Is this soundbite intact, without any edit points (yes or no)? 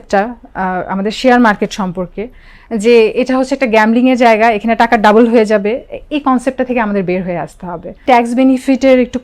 no